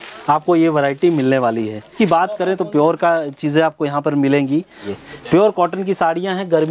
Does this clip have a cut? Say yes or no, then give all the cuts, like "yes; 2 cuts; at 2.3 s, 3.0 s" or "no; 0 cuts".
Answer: yes; 2 cuts; at 1.9 s, 4.8 s